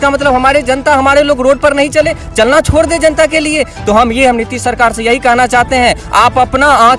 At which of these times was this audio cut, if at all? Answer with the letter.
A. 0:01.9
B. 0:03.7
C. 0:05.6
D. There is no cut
D